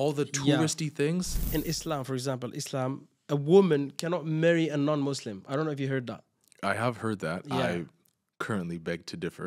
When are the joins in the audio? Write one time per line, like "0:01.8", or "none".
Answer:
0:01.4